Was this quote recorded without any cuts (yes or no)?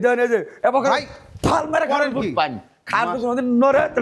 yes